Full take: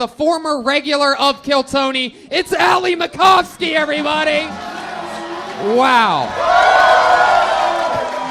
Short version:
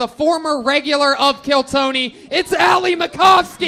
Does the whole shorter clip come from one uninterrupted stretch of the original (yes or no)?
yes